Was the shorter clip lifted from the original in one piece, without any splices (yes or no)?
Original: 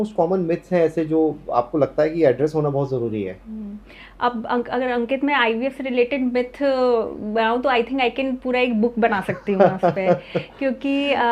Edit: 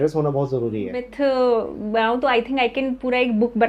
no